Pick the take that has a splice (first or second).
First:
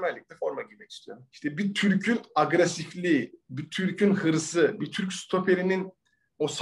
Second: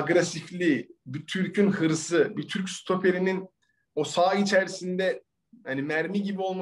first